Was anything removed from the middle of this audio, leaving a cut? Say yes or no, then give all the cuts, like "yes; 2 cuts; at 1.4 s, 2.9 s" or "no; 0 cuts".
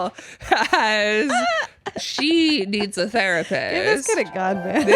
no; 0 cuts